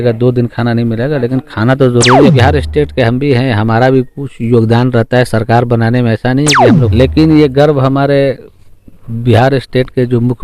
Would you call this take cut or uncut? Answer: cut